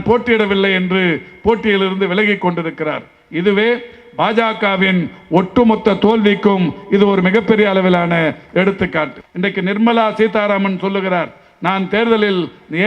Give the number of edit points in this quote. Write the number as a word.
one